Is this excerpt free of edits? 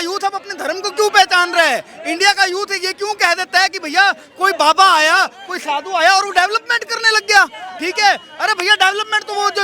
yes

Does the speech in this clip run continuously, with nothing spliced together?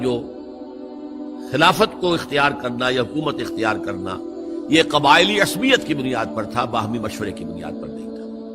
no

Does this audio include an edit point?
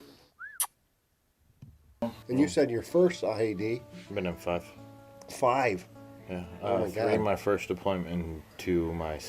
yes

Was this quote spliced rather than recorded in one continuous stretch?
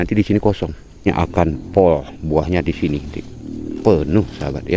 yes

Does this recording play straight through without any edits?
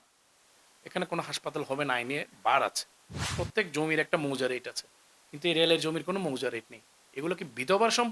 no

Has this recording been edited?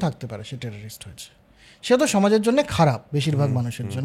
no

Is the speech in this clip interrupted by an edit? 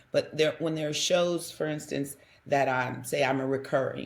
no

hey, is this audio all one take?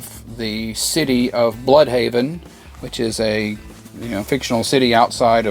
yes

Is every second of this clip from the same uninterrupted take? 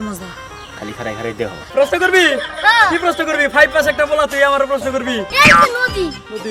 no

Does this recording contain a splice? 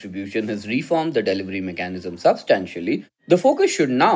yes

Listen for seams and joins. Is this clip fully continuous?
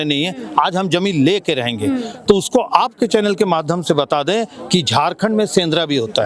yes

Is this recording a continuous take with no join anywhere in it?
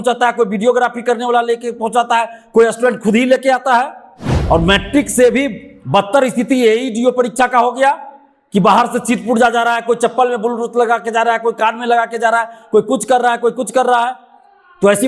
no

